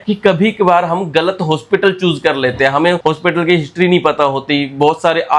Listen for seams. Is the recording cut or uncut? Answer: uncut